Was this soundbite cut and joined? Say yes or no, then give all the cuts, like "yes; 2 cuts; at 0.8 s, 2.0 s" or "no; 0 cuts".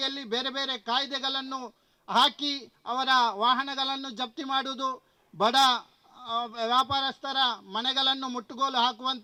no; 0 cuts